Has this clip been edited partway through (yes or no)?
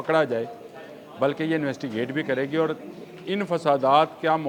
no